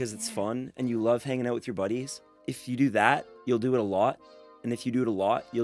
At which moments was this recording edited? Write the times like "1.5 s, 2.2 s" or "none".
2.5 s, 3.3 s